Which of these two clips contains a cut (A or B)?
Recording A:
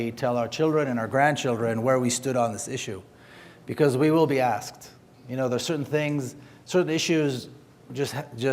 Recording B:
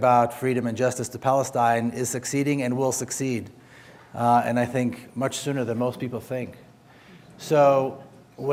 A